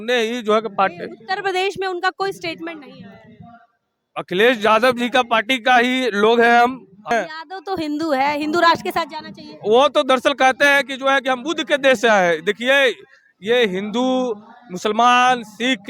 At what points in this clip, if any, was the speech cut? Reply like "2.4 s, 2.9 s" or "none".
7.1 s